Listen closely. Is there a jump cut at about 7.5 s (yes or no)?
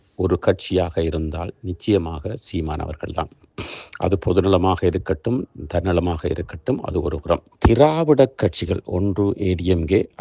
yes